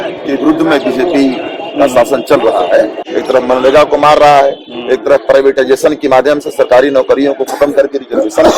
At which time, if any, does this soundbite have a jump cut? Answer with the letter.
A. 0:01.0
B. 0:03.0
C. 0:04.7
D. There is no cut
B